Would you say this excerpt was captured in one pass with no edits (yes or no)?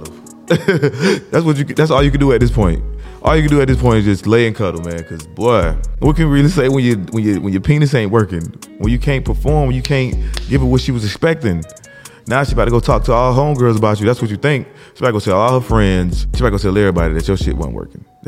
no